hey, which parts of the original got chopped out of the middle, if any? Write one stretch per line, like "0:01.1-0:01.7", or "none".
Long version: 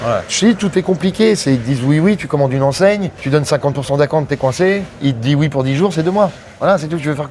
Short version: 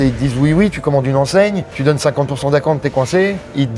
none